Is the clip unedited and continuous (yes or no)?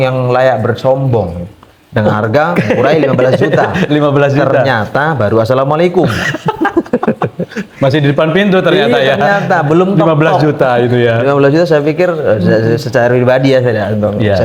yes